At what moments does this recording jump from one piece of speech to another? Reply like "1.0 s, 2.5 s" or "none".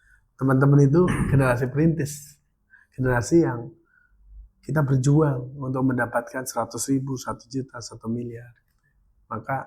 none

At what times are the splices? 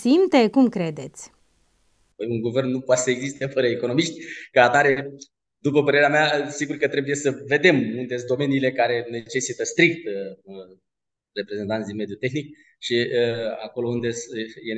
none

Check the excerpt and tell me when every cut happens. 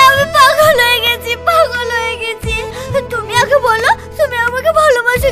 none

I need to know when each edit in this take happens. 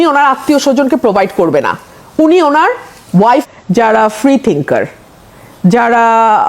3.5 s

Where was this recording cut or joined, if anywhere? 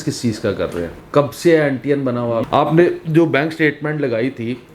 0.9 s, 2.4 s

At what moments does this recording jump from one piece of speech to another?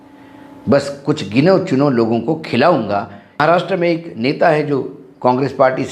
3.4 s

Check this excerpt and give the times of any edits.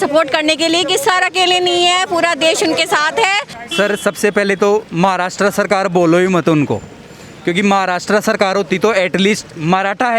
3.6 s

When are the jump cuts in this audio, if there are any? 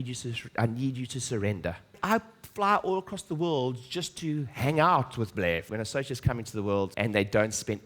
1.9 s, 5.7 s, 6.9 s

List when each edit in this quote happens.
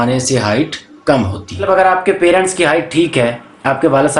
1.7 s

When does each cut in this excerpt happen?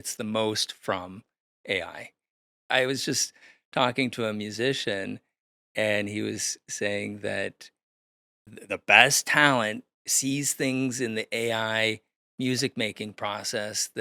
2.4 s

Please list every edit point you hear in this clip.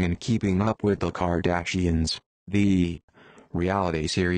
3.3 s

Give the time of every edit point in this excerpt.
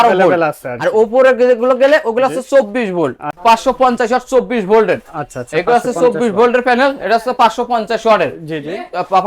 3.3 s

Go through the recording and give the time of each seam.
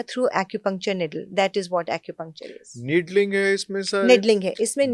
none

